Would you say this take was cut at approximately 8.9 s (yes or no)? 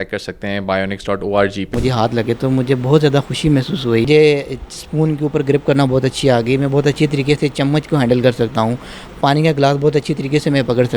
no